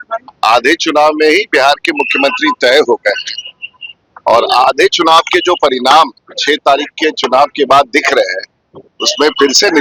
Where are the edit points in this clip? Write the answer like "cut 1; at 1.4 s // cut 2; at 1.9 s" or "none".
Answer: none